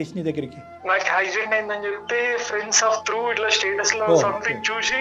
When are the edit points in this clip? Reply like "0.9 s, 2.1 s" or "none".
none